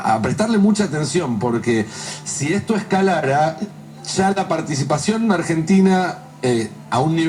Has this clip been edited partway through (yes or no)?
no